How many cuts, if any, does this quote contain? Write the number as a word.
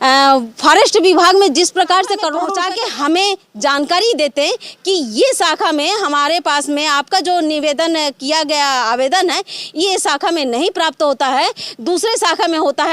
one